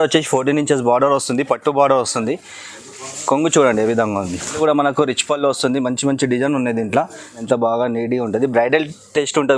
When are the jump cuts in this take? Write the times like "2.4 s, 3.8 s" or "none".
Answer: 4.5 s, 7.4 s